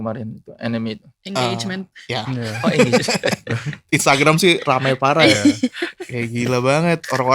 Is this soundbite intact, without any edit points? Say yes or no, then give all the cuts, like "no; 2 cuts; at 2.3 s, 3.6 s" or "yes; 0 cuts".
no; 1 cut; at 1.1 s